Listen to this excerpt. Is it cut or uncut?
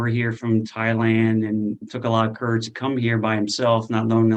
uncut